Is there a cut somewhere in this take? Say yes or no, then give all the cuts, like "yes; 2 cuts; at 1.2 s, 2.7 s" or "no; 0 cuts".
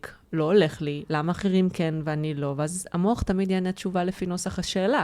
no; 0 cuts